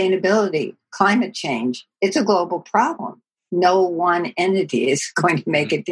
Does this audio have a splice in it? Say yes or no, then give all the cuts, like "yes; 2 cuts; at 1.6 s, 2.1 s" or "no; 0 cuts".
no; 0 cuts